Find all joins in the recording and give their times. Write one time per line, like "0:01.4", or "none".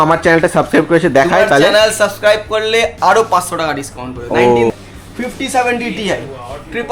0:04.7